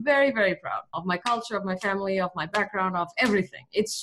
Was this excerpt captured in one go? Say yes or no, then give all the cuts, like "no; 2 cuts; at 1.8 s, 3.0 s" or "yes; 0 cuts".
no; 1 cut; at 1.0 s